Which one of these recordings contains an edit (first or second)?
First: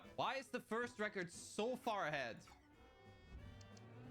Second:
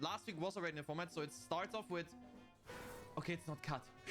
second